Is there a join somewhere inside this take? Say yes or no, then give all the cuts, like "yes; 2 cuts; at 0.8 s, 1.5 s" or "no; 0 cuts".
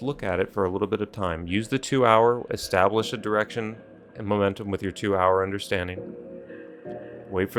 no; 0 cuts